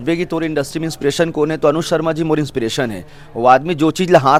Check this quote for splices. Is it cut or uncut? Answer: uncut